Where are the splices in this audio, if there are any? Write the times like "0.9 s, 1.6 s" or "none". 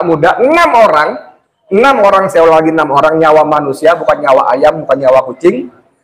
none